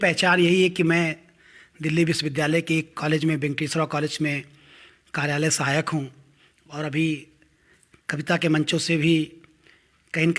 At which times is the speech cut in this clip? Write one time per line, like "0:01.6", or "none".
0:08.9